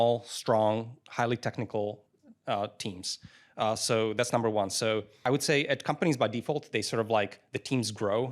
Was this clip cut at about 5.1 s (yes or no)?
yes